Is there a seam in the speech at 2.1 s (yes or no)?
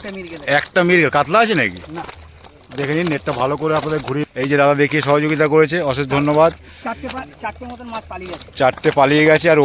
no